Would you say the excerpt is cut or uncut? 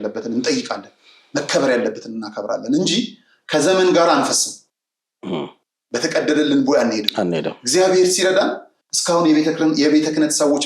uncut